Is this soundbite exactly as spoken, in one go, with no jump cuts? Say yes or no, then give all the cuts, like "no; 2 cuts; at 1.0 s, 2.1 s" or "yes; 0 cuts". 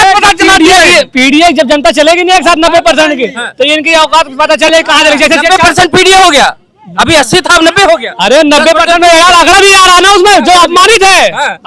yes; 0 cuts